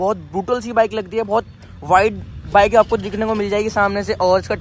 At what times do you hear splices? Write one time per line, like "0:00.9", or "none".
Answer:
none